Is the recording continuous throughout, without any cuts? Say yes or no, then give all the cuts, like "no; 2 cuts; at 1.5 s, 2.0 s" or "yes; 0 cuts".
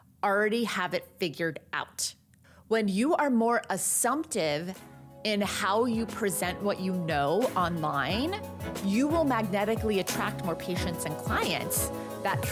yes; 0 cuts